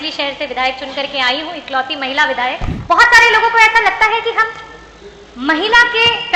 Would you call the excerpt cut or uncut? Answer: cut